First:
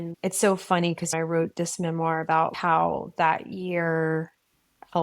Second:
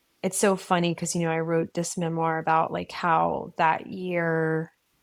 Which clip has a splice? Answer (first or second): first